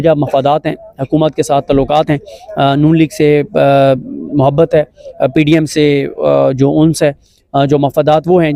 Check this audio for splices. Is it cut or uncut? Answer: uncut